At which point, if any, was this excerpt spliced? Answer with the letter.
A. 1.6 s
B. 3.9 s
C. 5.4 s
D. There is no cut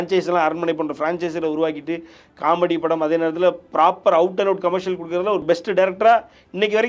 C